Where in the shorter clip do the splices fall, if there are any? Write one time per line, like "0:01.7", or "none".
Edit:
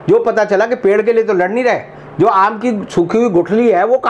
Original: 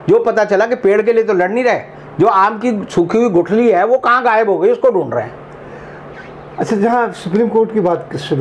none